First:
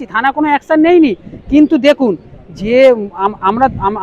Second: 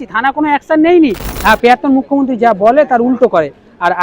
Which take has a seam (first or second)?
second